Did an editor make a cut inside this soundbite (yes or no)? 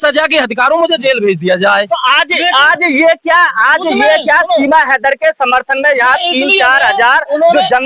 no